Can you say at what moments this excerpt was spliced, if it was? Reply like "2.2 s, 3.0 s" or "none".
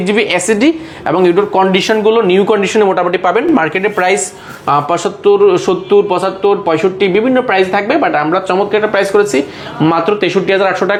none